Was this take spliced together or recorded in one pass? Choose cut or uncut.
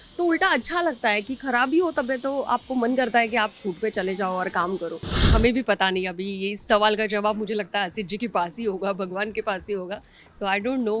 cut